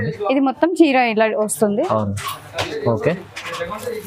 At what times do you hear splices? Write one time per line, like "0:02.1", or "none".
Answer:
none